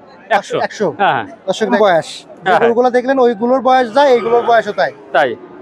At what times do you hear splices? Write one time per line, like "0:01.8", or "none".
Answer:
0:01.7